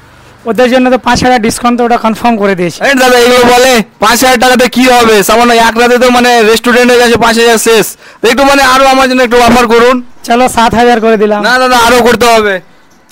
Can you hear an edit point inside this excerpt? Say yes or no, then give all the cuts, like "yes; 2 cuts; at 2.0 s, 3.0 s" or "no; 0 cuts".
no; 0 cuts